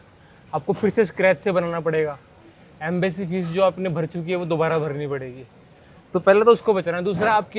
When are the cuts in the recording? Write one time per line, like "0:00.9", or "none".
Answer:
none

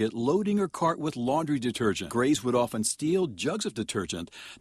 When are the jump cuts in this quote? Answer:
0:02.1

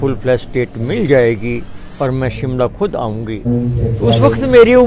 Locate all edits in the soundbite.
0:03.5

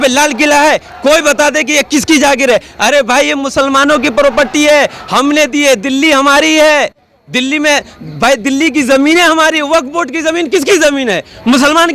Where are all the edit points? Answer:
none

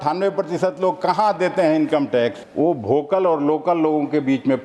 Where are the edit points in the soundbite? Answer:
0:02.4

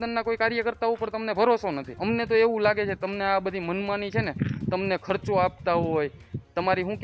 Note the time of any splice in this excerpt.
0:01.9

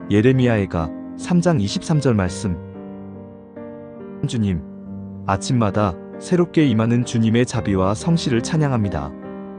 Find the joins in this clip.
none

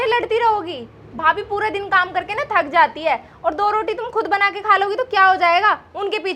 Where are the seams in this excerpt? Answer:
none

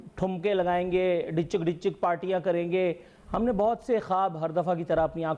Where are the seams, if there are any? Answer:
none

